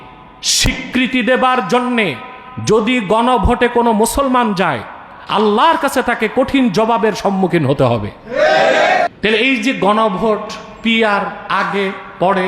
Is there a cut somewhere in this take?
yes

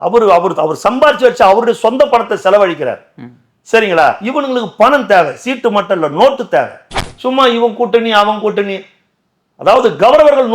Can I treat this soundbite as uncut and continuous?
no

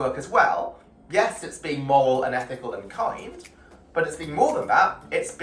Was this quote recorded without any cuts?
yes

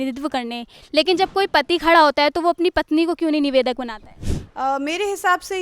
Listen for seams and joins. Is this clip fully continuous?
no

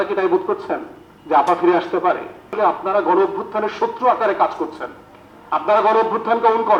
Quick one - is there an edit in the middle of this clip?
yes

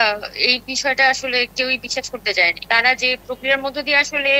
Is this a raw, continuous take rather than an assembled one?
no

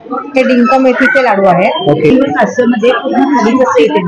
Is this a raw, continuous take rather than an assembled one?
no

